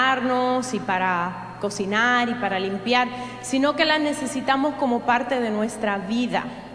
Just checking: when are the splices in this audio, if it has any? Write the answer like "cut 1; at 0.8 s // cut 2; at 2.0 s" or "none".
cut 1; at 4.2 s